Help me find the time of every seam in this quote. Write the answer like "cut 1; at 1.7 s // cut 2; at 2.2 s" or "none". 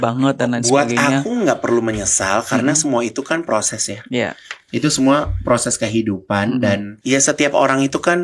cut 1; at 6.9 s